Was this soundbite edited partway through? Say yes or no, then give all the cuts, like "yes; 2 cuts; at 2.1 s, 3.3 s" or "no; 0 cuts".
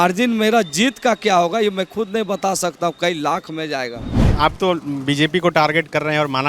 yes; 1 cut; at 4.2 s